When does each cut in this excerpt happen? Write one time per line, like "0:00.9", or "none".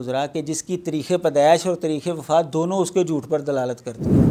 none

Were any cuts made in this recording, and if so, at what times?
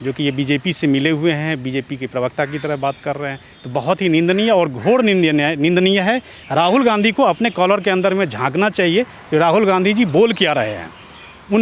none

